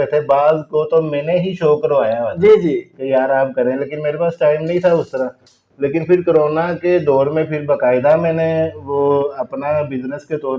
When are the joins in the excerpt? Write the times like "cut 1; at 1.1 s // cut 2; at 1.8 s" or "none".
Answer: none